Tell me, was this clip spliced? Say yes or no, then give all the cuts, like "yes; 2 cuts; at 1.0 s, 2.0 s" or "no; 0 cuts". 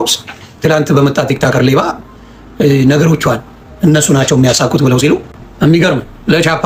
no; 0 cuts